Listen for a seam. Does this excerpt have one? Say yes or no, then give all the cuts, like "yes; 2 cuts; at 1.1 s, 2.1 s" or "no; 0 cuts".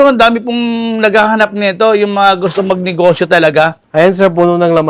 no; 0 cuts